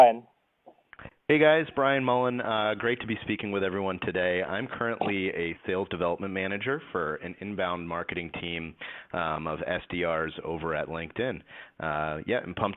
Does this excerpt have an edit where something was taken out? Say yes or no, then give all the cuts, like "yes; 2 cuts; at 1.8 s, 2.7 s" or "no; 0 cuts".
no; 0 cuts